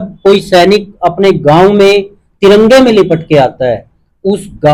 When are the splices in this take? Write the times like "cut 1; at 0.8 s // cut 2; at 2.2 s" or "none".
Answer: none